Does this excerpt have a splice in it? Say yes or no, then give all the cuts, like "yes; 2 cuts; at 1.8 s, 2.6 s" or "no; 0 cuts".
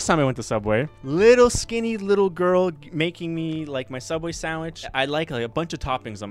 yes; 2 cuts; at 1.0 s, 4.8 s